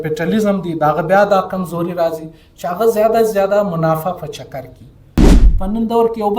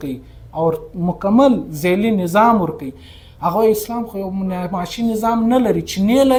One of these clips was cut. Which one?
first; 1 cut; at 5.3 s

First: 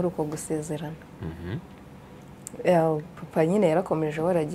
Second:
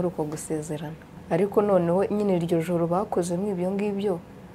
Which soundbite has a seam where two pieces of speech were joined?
second; 1 cut; at 1.1 s

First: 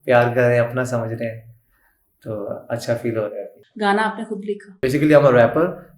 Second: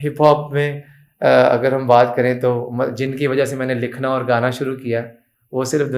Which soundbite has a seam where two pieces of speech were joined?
first; 2 cuts; at 3.6 s, 4.7 s

